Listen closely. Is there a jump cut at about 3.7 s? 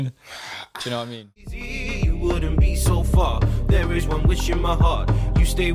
no; 1 cut; at 1.3 s

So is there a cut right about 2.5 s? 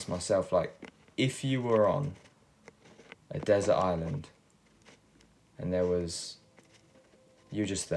no; 0 cuts

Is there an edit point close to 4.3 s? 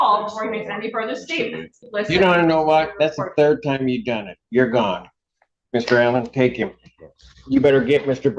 no; 1 cut; at 1.8 s

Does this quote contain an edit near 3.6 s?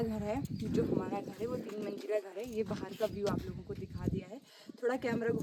no; 0 cuts

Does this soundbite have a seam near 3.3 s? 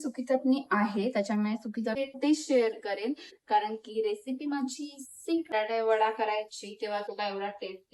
no; 2 cuts; at 2.0 s, 5.5 s

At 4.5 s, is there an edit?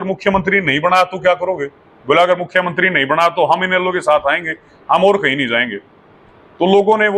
no; 0 cuts

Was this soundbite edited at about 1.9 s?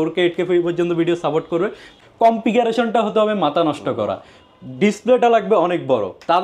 yes; 1 cut; at 1.9 s

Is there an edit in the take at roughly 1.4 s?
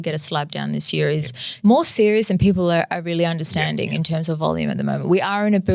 yes; 1 cut; at 1.4 s

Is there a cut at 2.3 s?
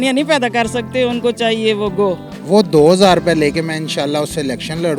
yes; 1 cut; at 2.3 s

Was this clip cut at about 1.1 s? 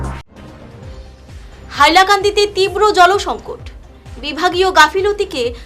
yes; 1 cut; at 1.1 s

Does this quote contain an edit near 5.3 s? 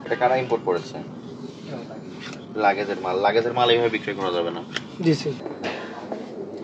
yes; 1 cut; at 5.3 s

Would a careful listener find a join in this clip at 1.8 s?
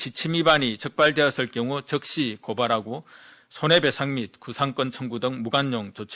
no; 0 cuts

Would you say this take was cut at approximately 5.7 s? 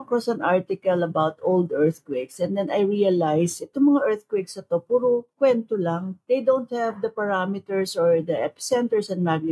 yes; 1 cut; at 5.7 s

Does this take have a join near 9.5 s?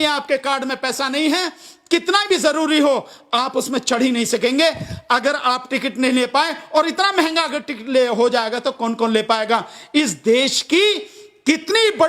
no; 0 cuts

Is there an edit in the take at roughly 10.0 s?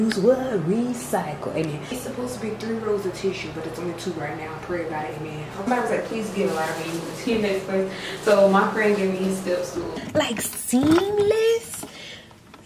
yes; 3 cuts; at 2.0 s, 5.7 s, 10.0 s

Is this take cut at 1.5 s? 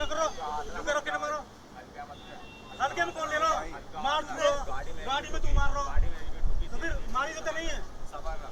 no; 0 cuts

